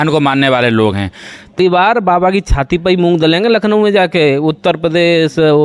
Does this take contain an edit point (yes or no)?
yes